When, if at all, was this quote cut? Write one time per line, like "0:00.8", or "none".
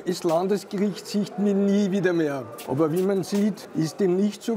0:02.5
0:03.6